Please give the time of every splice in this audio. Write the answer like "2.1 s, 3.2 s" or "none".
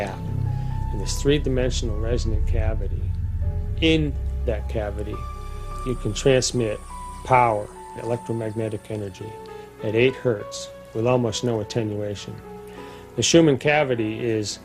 3.0 s